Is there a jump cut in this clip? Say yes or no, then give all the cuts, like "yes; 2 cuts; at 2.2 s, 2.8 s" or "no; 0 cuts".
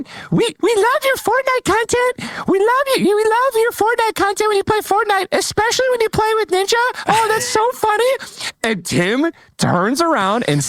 no; 0 cuts